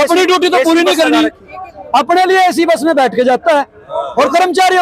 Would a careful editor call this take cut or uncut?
uncut